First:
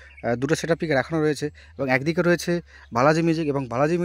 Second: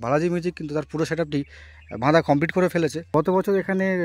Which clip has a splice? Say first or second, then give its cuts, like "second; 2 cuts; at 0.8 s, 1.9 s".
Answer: second; 1 cut; at 3.0 s